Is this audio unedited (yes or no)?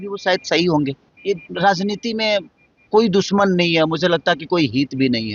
no